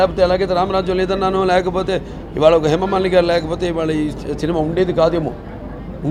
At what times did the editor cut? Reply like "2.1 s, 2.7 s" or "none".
none